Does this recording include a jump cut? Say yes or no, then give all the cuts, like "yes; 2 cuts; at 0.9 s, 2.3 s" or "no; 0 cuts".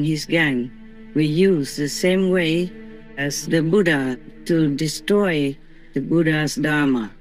no; 0 cuts